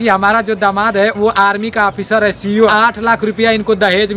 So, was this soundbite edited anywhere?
yes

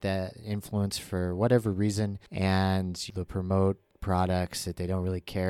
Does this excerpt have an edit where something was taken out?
yes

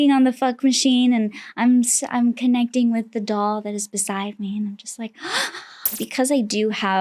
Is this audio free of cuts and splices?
no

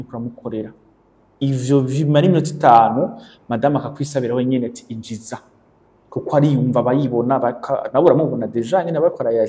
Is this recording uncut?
yes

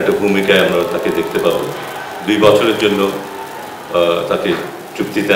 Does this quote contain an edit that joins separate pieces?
no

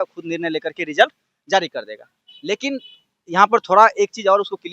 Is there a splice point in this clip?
no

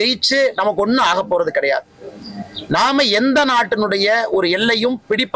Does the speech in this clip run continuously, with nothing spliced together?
yes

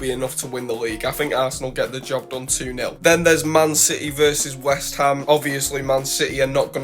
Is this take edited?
yes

